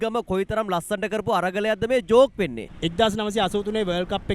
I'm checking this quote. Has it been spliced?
yes; 1 cut; at 2.7 s

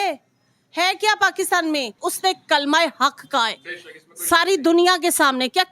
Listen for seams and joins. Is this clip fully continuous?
no; 1 cut; at 2.0 s

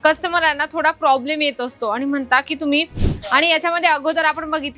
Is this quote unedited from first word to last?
no; 1 cut; at 3.0 s

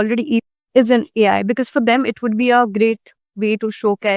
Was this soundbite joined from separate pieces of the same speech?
no; 0 cuts

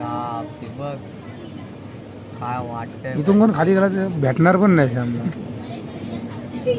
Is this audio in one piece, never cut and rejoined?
yes; 0 cuts

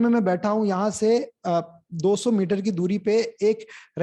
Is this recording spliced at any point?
no; 0 cuts

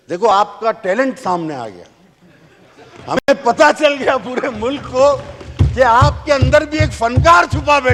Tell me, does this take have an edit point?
no; 0 cuts

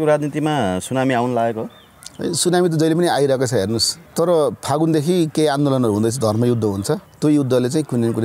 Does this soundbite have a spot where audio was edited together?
yes; 2 cuts; at 4.0 s, 7.1 s

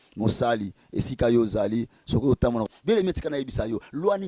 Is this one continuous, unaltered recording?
no; 1 cut; at 2.6 s

